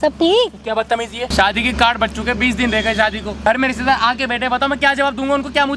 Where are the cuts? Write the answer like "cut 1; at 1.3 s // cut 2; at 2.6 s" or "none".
cut 1; at 1.3 s // cut 2; at 3.3 s

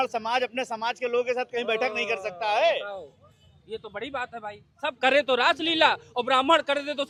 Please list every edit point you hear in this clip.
none

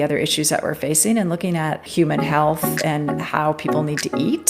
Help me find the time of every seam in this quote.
cut 1; at 1.9 s

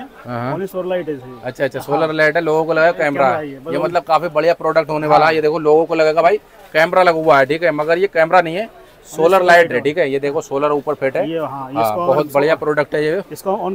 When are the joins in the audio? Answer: none

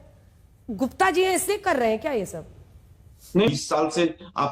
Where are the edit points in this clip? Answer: cut 1; at 3.5 s

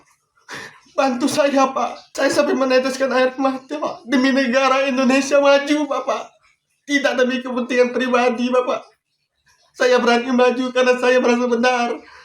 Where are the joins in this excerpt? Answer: cut 1; at 2.0 s

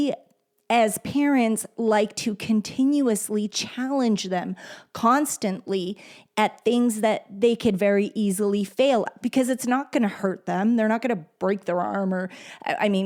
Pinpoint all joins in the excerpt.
none

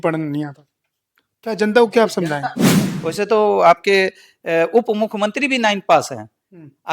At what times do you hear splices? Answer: cut 1; at 2.9 s

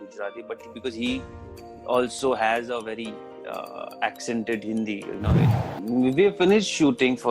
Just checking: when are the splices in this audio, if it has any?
cut 1; at 5.5 s

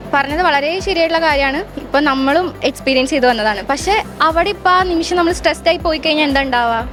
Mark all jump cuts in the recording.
none

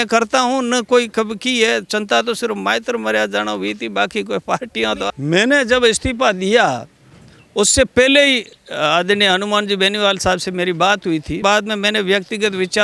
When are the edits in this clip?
cut 1; at 5.1 s // cut 2; at 11.4 s

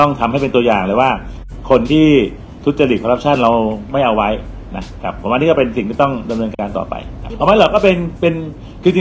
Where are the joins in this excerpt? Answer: cut 1; at 7.2 s

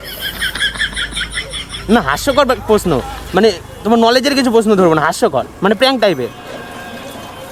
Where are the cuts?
none

